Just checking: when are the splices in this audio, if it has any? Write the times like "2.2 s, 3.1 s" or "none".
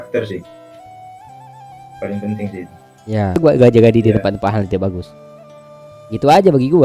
3.4 s

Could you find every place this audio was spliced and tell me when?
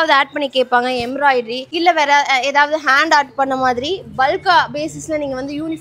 1.6 s

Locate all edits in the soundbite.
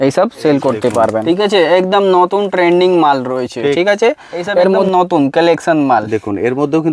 1.2 s, 4.9 s

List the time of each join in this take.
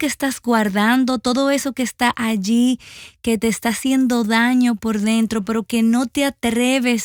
none

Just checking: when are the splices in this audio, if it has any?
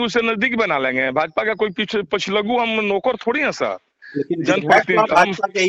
none

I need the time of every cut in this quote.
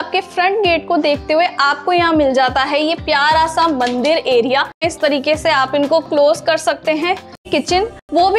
4.9 s, 7.5 s

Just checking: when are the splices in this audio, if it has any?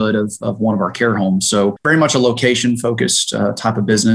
1.8 s

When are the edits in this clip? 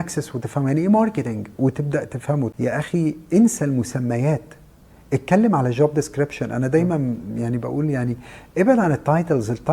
2.5 s

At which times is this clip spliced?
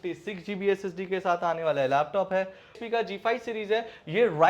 2.8 s

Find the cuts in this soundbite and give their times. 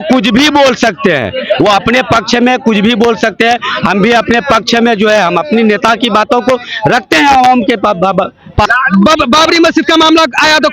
8.7 s

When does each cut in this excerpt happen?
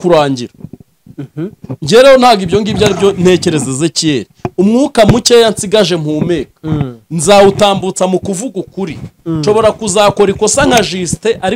none

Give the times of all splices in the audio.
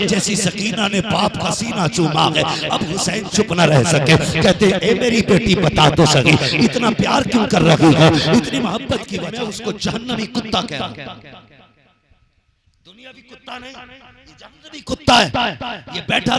9.1 s

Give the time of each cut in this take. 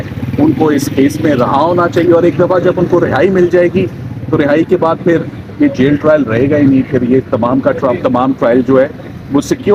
none

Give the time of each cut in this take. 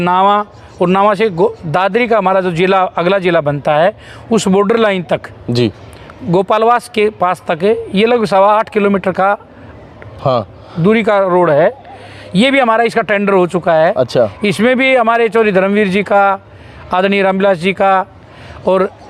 none

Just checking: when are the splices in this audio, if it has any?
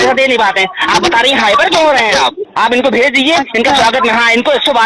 2.4 s

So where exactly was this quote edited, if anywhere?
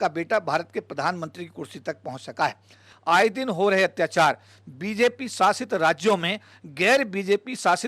2.9 s

